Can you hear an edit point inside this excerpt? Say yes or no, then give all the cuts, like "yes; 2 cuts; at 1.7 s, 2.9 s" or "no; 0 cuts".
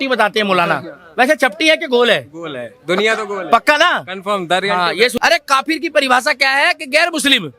yes; 1 cut; at 5.1 s